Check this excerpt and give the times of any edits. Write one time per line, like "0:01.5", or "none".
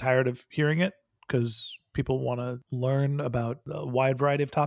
0:02.6
0:03.7